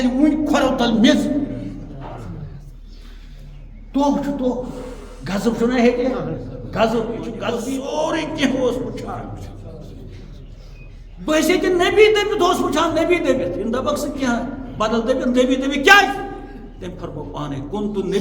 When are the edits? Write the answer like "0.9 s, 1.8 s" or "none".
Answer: 7.6 s